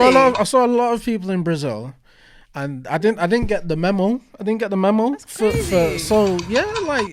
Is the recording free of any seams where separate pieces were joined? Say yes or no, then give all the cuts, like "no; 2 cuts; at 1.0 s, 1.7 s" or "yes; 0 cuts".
yes; 0 cuts